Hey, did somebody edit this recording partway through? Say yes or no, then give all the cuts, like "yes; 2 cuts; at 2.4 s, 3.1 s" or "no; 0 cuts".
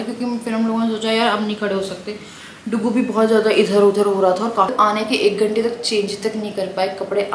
yes; 1 cut; at 4.7 s